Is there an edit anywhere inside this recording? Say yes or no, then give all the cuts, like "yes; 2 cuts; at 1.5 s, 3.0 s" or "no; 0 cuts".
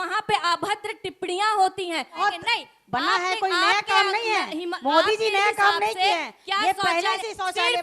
yes; 1 cut; at 2.2 s